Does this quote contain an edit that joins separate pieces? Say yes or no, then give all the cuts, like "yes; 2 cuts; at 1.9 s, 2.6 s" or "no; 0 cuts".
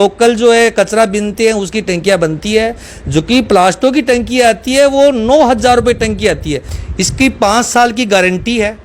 yes; 1 cut; at 6.7 s